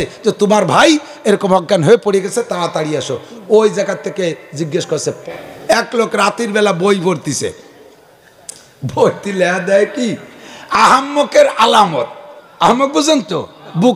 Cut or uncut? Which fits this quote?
cut